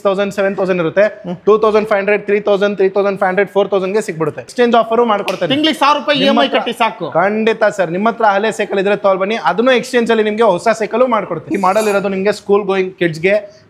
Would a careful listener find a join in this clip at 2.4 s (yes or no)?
no